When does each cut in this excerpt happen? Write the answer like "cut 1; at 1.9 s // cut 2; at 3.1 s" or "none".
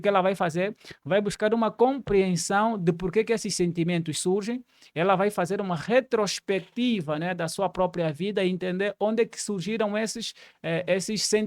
none